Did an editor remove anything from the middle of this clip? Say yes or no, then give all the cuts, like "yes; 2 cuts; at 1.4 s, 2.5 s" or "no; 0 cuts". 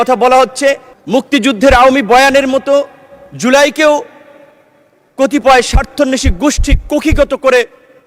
yes; 1 cut; at 0.9 s